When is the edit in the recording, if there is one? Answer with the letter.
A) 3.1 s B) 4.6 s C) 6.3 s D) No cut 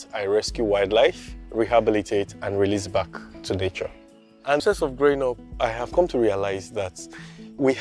B